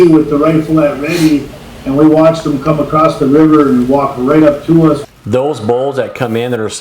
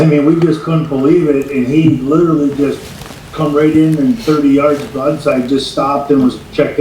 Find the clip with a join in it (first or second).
first